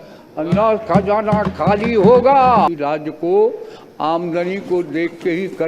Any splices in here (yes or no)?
yes